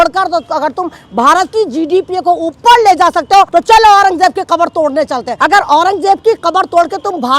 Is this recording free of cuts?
no; 2 cuts; at 3.5 s, 5.3 s

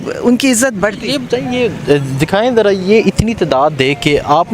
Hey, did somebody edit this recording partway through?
no; 0 cuts

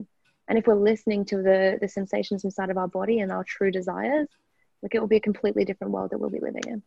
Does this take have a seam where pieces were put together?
no; 0 cuts

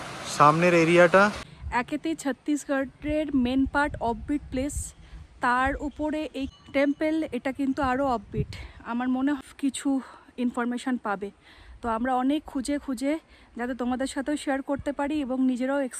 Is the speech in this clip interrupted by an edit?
yes; 3 cuts; at 1.5 s, 6.5 s, 9.4 s

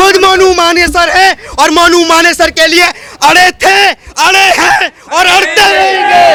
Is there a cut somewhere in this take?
no; 0 cuts

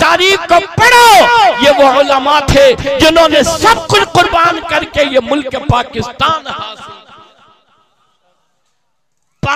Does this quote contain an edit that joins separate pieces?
no; 0 cuts

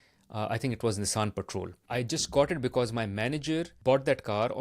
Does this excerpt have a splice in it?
yes; 2 cuts; at 1.8 s, 3.7 s

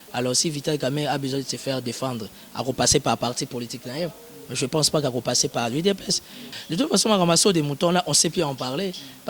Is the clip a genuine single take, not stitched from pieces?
no; 1 cut; at 6.5 s

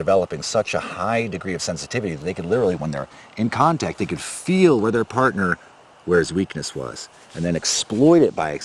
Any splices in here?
no; 0 cuts

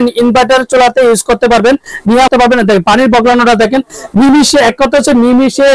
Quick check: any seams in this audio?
yes; 1 cut; at 2.3 s

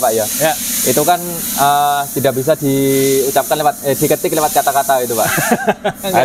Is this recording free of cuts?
yes; 0 cuts

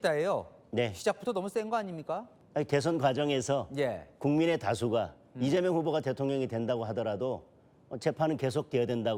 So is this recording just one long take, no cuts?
no; 1 cut; at 2.4 s

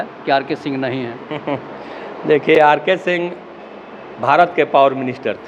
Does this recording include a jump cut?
no; 0 cuts

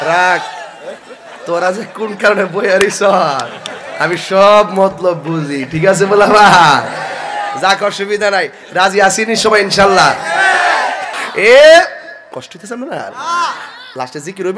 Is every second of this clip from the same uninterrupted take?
yes; 0 cuts

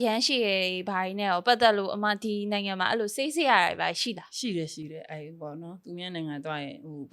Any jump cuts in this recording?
no; 0 cuts

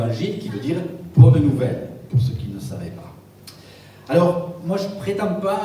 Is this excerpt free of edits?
yes; 0 cuts

